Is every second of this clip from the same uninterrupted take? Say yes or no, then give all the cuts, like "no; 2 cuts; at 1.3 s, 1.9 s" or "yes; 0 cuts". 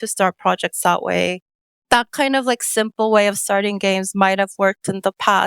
no; 1 cut; at 1.6 s